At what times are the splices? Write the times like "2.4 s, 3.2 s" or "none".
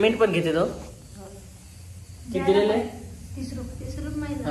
none